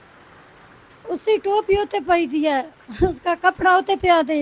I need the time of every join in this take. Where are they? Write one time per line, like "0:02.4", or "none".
none